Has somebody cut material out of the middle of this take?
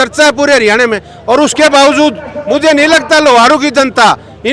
no; 0 cuts

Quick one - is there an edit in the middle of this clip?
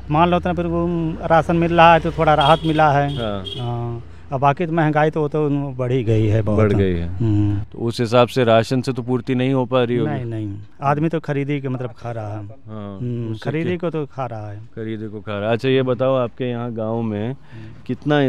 no; 0 cuts

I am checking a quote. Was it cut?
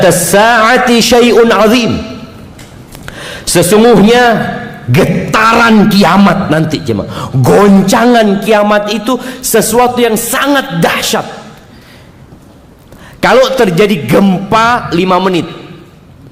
no; 0 cuts

